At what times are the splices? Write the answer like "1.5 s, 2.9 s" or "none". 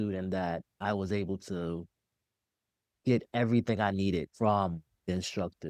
4.3 s